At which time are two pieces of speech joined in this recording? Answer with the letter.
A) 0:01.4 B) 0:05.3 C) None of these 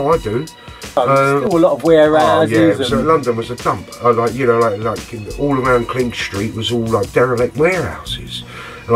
A